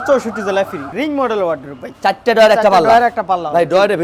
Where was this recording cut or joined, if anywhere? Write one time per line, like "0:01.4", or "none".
0:00.9